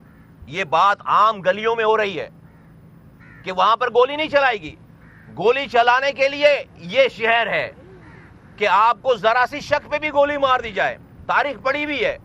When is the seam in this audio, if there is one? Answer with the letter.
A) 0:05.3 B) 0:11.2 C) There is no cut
C